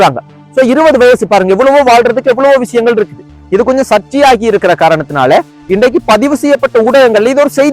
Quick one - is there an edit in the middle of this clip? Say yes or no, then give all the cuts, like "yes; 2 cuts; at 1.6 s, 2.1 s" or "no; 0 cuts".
yes; 1 cut; at 3.4 s